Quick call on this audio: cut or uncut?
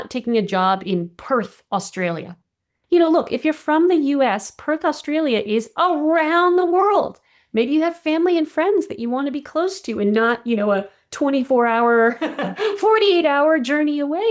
uncut